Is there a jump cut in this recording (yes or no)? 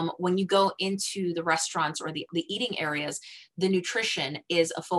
yes